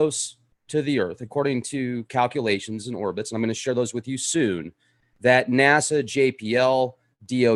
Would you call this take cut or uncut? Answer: cut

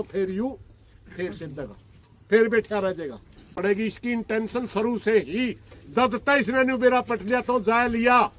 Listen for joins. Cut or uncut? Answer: cut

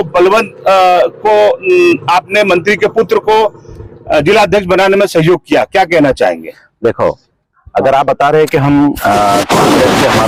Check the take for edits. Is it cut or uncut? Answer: uncut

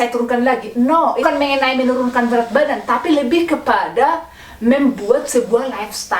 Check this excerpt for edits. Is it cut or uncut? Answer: cut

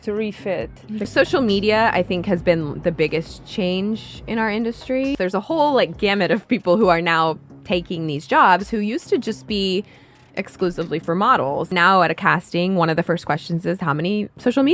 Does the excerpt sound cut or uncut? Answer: cut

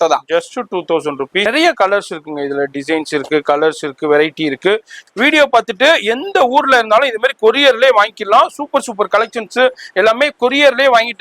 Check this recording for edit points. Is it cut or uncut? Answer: cut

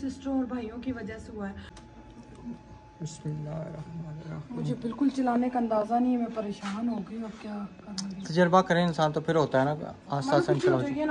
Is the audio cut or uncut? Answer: cut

